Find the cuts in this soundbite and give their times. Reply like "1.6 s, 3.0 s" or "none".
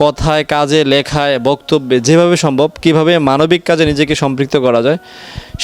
none